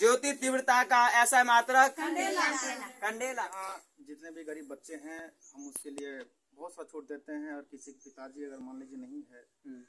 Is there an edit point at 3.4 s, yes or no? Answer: yes